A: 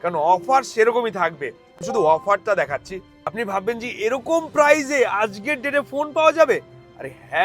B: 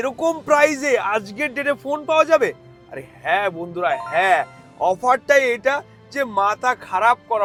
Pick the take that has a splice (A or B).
A